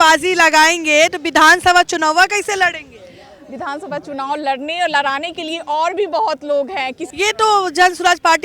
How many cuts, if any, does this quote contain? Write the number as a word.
one